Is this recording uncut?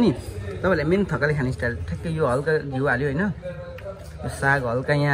yes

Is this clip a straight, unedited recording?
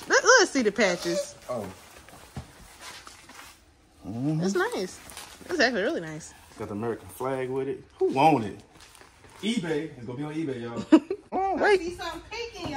no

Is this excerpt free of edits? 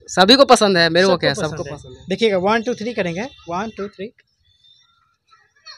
yes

